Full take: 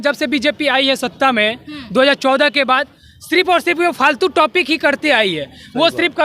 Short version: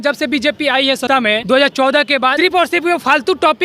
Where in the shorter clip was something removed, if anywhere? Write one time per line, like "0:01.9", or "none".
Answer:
0:01.1
0:02.3